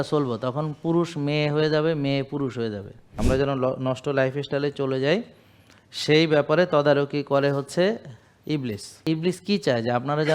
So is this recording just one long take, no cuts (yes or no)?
no